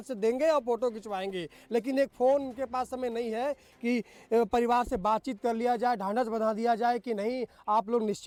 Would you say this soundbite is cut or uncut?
uncut